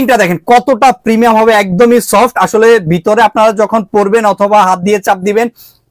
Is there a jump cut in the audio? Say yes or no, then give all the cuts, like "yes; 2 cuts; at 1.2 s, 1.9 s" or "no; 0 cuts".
no; 0 cuts